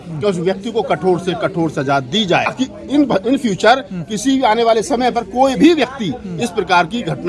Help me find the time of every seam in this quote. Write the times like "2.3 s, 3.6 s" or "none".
2.5 s